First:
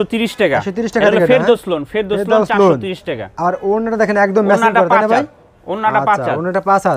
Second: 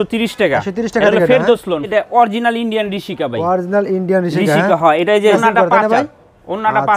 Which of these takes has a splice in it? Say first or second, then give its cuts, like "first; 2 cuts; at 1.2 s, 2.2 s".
second; 2 cuts; at 1.9 s, 5.4 s